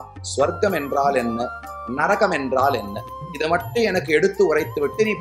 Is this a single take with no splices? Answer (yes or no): yes